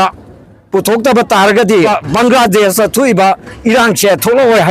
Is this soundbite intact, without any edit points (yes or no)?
no